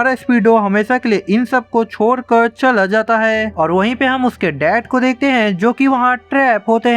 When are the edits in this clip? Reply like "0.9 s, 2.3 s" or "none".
3.5 s